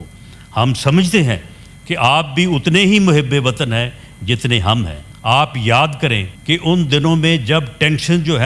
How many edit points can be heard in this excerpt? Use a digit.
2